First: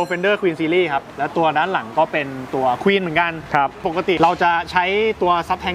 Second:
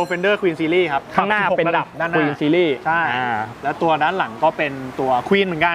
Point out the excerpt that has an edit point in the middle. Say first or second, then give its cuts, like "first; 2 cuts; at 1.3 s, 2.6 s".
first; 2 cuts; at 1.1 s, 3.8 s